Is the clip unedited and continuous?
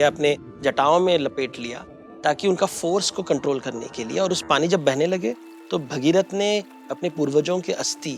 yes; 0 cuts

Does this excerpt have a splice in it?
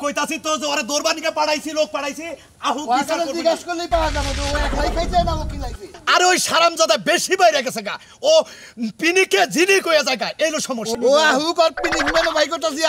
no; 0 cuts

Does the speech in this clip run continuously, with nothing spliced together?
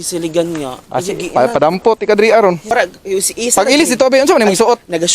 no; 1 cut; at 2.6 s

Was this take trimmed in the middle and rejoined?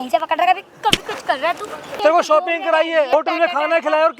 yes; 2 cuts; at 1.9 s, 3.1 s

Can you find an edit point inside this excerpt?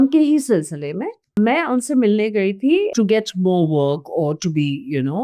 yes; 2 cuts; at 1.3 s, 2.9 s

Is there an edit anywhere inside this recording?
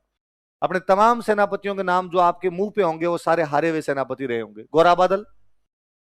no; 0 cuts

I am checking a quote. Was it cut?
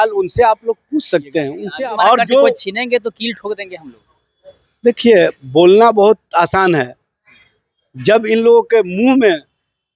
yes; 1 cut; at 1.6 s

